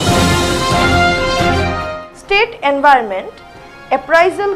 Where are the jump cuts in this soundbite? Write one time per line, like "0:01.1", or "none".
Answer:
0:01.8